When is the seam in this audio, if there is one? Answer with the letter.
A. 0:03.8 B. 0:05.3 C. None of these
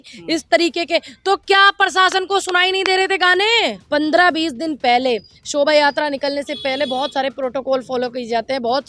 A